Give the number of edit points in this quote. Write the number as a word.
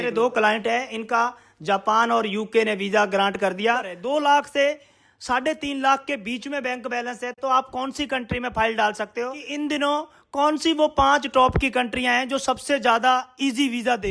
two